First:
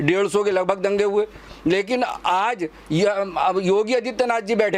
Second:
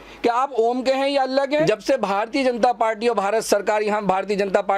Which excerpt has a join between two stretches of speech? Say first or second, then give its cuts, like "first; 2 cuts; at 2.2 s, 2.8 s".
second; 1 cut; at 1.6 s